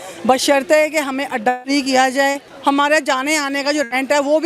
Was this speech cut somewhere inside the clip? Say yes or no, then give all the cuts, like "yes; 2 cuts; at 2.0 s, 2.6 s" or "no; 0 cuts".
yes; 1 cut; at 2.5 s